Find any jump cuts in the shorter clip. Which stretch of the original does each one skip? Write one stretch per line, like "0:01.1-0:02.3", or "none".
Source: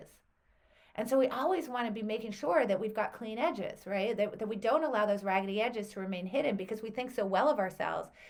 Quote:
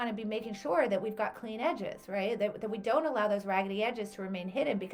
none